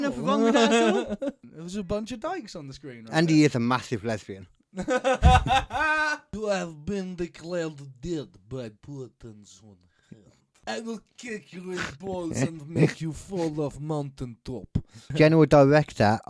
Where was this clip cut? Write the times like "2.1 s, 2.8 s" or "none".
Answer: 1.4 s, 6.3 s, 10.6 s, 15.0 s